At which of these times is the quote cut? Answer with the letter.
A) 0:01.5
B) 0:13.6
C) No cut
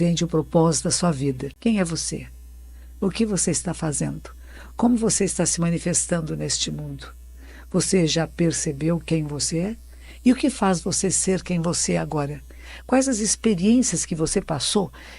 A